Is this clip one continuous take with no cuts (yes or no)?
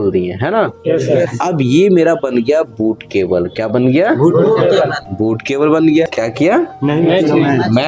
no